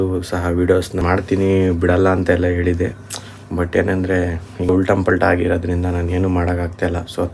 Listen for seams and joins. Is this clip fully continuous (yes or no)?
no